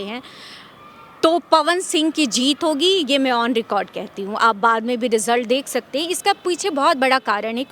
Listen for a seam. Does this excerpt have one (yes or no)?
no